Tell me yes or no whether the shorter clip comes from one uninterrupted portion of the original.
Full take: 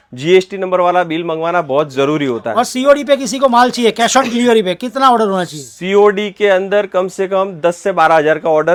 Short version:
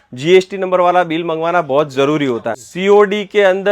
no